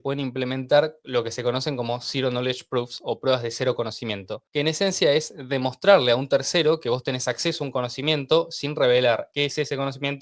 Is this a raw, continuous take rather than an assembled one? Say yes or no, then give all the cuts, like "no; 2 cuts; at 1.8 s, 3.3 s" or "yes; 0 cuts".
yes; 0 cuts